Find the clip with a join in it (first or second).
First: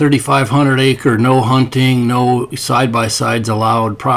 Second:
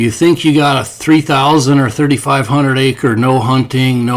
second